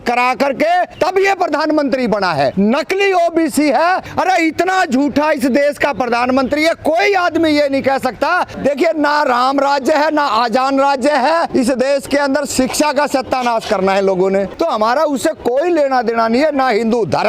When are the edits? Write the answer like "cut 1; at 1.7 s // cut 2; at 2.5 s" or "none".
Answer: cut 1; at 0.9 s // cut 2; at 2.5 s // cut 3; at 4.1 s // cut 4; at 8.5 s // cut 5; at 11.5 s // cut 6; at 14.5 s